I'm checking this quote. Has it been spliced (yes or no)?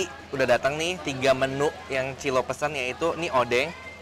no